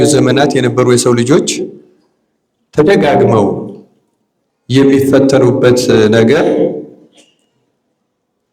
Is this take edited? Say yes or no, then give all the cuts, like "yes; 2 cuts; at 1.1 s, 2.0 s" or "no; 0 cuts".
no; 0 cuts